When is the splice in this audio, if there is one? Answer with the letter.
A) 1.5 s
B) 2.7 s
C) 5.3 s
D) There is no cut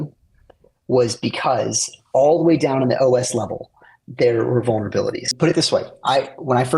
C